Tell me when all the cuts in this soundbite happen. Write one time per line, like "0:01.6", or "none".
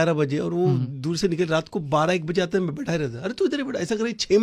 none